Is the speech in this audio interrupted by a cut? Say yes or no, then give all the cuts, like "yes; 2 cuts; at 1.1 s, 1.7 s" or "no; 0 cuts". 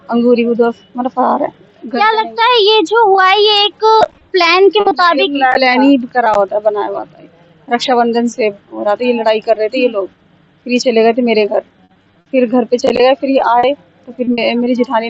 no; 0 cuts